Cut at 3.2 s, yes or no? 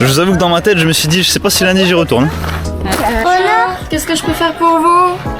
yes